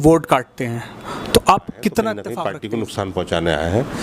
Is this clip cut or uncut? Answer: cut